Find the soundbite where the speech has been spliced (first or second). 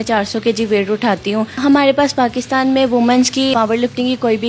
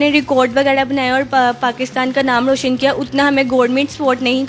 first